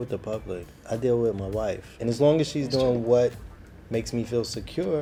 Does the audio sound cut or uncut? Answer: uncut